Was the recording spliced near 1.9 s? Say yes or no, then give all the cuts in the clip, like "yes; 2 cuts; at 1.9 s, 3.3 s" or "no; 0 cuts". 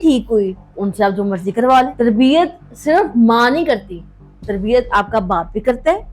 yes; 1 cut; at 1.9 s